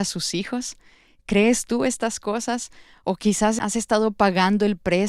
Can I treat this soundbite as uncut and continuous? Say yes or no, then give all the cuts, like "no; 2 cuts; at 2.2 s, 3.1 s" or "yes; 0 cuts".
no; 1 cut; at 3.6 s